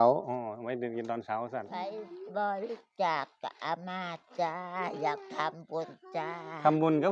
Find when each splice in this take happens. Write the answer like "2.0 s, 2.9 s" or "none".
1.9 s